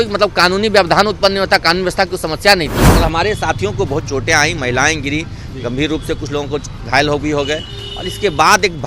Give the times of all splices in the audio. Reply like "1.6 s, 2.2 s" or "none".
2.9 s